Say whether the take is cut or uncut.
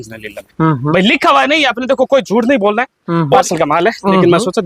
cut